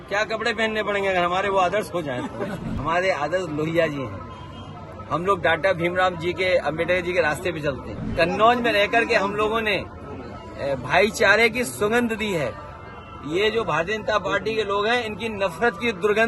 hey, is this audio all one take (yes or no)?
no